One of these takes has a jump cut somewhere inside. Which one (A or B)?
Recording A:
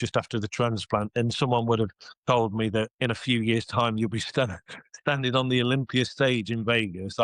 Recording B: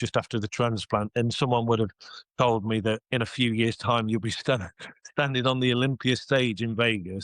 A